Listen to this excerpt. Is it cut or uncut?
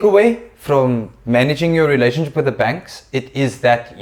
uncut